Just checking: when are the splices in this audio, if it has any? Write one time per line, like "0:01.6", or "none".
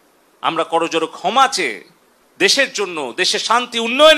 none

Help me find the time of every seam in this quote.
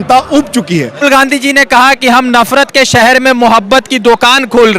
0:01.0

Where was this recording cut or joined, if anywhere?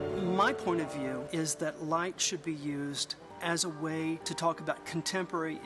0:01.3
0:03.2
0:04.3

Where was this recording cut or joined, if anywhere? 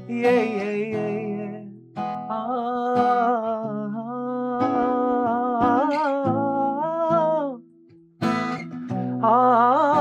none

